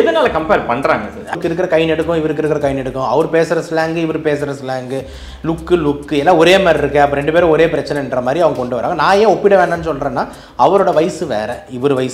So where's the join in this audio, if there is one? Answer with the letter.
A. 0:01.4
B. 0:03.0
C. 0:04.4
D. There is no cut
A